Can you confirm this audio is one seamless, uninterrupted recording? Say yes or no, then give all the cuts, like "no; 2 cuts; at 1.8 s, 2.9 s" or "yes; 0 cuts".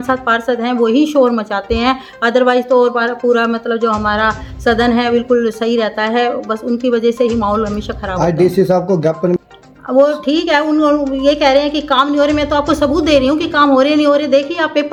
yes; 0 cuts